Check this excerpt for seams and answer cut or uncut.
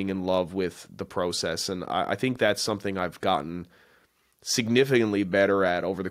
uncut